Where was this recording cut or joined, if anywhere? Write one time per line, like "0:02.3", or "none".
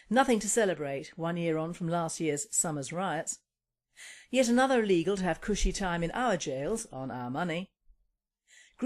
0:02.1